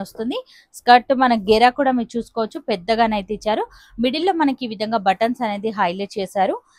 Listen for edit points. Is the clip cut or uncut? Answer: uncut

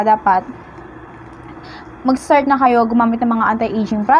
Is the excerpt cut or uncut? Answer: uncut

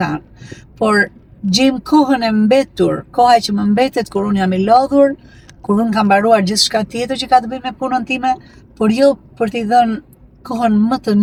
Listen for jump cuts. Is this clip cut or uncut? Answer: uncut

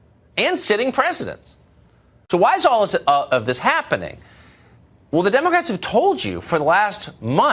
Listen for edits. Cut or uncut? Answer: uncut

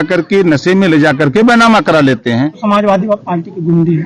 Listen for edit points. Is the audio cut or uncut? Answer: cut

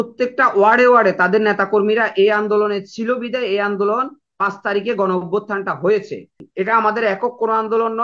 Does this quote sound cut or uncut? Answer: cut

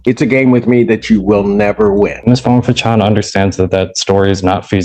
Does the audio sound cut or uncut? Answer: cut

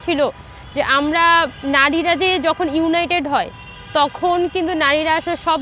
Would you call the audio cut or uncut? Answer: uncut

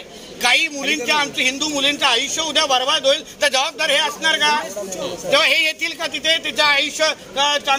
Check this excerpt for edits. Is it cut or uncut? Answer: uncut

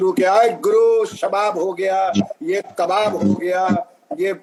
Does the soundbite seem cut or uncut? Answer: uncut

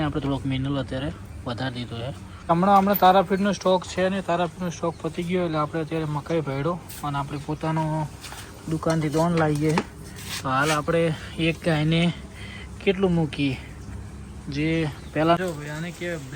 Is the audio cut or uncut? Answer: cut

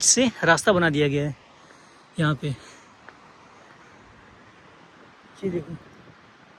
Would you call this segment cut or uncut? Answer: uncut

